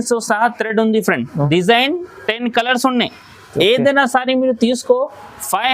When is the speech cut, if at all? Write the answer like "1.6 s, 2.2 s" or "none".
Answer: 1.5 s